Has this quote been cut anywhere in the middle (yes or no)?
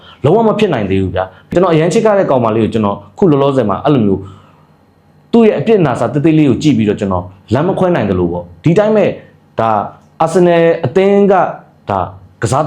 yes